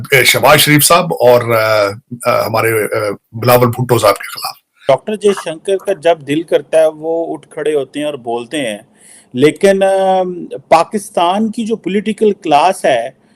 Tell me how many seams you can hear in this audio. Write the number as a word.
one